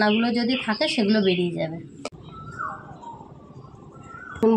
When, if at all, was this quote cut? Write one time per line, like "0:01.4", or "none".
0:02.1